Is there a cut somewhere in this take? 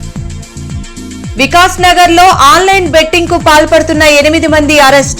no; 0 cuts

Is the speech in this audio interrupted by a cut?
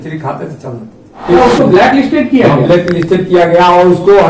yes; 1 cut; at 1.1 s

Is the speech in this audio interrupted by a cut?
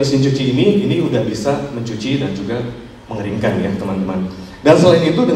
no; 0 cuts

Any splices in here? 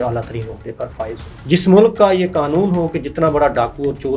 yes; 1 cut; at 1.3 s

